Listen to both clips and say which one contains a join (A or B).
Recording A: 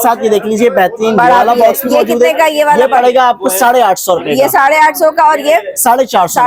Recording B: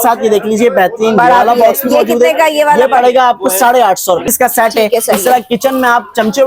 B